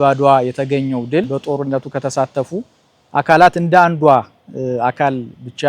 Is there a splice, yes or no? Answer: yes